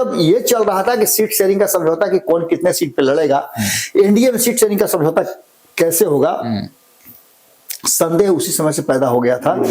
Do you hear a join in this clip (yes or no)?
no